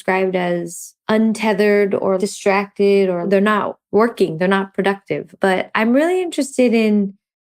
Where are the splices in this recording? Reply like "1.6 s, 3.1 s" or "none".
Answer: 2.2 s, 3.3 s, 5.3 s